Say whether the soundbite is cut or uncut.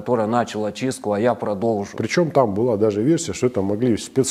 cut